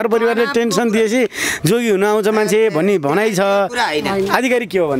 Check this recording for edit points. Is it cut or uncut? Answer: uncut